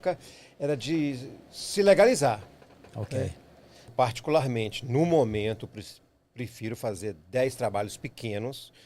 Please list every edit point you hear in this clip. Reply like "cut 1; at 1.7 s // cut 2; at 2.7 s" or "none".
cut 1; at 3.9 s